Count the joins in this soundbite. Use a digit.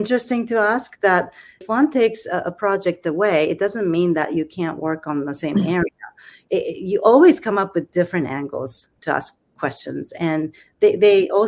2